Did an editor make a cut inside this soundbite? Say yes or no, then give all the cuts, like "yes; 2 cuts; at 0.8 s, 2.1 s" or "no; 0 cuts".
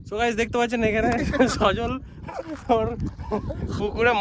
no; 0 cuts